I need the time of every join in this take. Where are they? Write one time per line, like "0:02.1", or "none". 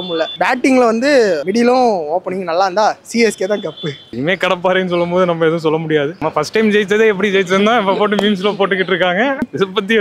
0:04.0